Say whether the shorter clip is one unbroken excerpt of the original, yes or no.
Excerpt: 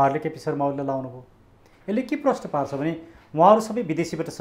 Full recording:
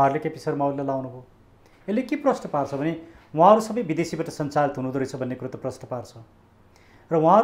yes